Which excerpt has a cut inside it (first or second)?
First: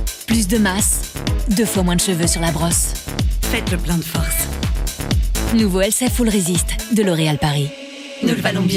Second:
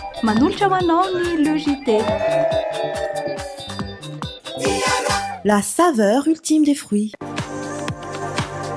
second